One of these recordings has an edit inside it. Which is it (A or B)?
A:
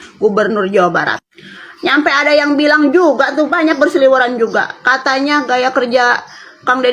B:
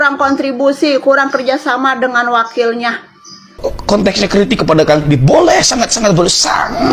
B